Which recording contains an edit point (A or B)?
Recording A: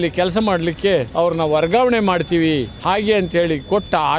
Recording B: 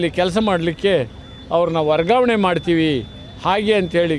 A